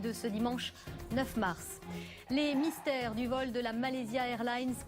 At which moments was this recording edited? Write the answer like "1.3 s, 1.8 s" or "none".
1.9 s